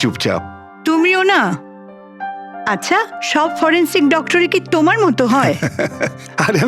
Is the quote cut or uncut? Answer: cut